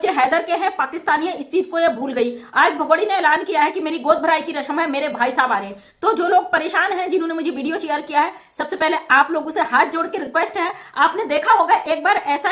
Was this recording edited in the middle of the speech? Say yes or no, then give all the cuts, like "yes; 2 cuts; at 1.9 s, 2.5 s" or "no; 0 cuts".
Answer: no; 0 cuts